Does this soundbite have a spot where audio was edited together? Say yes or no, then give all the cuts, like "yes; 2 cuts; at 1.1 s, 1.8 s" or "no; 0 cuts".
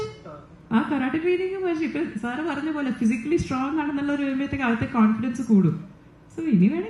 no; 0 cuts